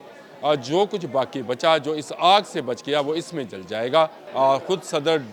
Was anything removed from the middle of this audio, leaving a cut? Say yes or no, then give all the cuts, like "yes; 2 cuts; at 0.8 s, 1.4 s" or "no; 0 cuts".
yes; 1 cut; at 4.2 s